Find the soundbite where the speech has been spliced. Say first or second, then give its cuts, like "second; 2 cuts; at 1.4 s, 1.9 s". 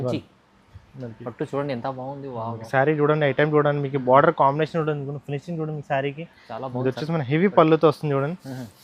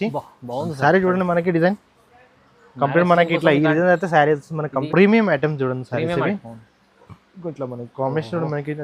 second; 1 cut; at 4.7 s